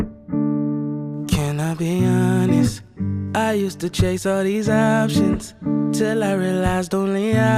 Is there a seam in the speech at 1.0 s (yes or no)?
yes